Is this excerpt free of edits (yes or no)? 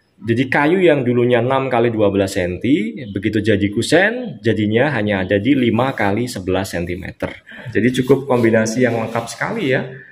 no